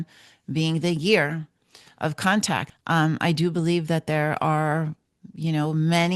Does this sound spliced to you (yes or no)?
yes